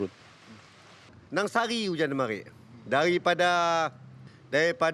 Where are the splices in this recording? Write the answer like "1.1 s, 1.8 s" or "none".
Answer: 1.1 s